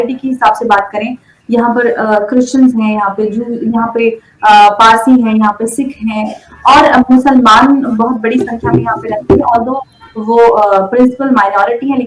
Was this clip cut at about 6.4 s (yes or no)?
no